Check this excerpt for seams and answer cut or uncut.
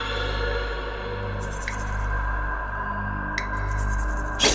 uncut